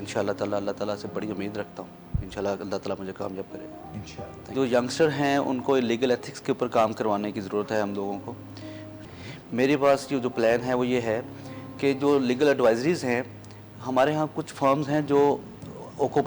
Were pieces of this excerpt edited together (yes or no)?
yes